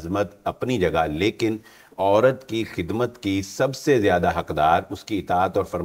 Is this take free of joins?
yes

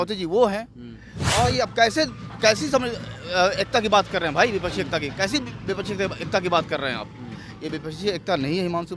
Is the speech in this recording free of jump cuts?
no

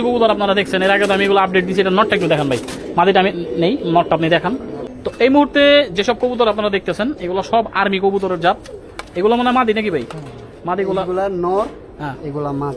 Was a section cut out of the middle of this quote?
yes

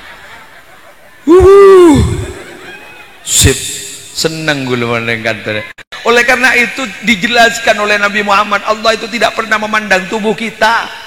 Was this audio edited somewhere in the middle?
yes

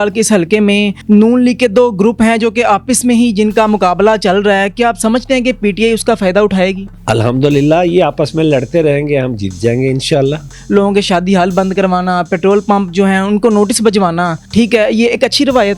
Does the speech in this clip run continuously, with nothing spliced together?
no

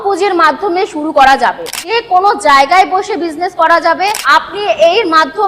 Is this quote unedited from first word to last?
no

